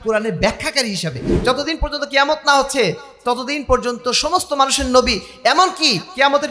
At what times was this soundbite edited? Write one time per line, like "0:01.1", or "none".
0:01.3